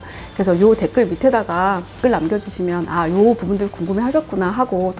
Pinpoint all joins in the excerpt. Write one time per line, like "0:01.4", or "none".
none